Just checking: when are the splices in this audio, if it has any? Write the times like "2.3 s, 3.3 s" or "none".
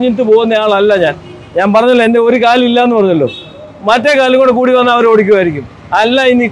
none